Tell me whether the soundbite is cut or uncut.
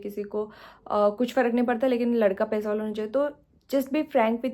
uncut